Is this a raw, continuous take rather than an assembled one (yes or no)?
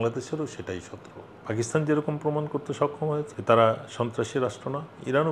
no